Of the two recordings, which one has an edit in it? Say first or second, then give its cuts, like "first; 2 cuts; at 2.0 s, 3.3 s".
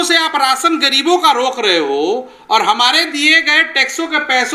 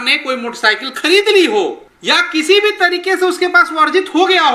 second; 1 cut; at 1.9 s